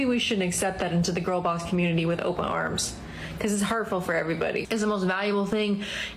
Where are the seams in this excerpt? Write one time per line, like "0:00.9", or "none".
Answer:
0:04.6